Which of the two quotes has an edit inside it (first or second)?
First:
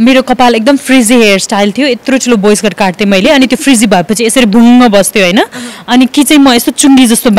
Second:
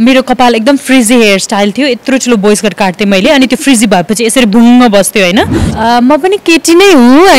second